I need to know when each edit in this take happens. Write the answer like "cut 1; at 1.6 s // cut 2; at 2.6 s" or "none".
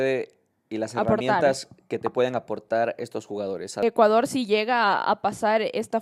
cut 1; at 3.8 s